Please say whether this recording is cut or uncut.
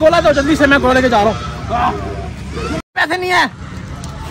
cut